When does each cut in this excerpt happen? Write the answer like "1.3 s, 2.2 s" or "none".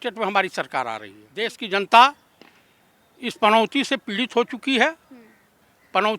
1.6 s